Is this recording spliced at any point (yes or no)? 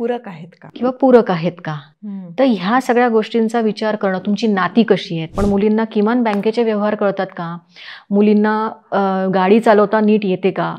yes